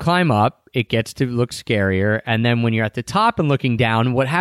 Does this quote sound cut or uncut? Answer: uncut